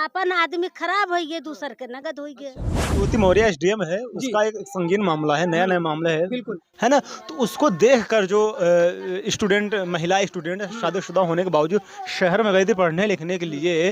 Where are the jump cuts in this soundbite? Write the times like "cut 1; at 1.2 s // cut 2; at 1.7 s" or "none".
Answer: cut 1; at 3.0 s

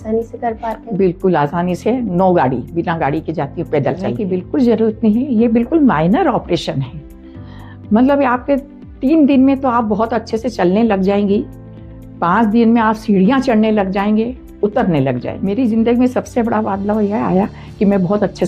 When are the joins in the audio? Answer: cut 1; at 4.2 s // cut 2; at 15.3 s

